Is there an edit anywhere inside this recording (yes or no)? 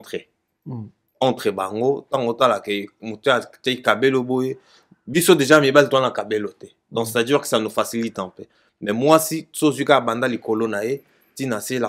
no